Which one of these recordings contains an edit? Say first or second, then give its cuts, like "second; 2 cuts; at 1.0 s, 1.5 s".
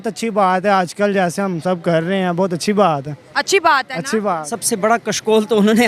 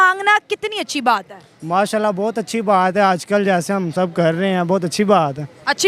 first; 1 cut; at 4.5 s